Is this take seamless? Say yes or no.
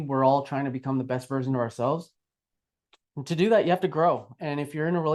yes